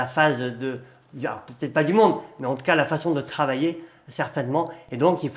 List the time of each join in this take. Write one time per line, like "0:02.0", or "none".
none

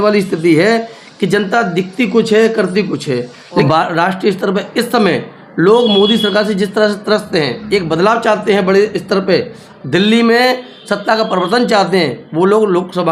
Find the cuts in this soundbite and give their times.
0:03.6

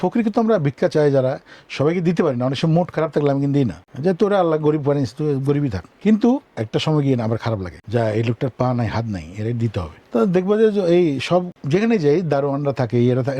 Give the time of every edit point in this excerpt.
0:03.8
0:05.8
0:07.7
0:10.0
0:11.6

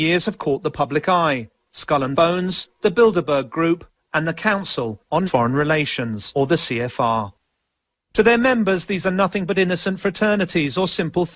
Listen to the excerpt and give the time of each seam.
0:09.4

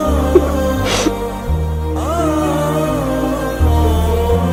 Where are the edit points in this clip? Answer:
none

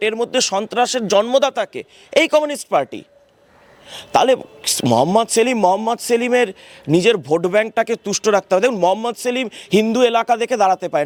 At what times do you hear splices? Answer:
none

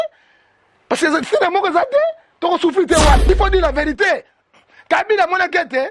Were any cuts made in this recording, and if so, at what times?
0:03.3

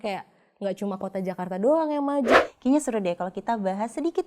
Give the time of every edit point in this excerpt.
0:02.3

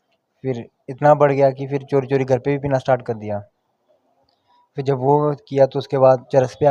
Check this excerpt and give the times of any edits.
none

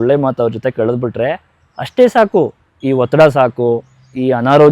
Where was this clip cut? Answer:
0:02.7

